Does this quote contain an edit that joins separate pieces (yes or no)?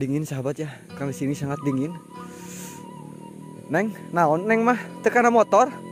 no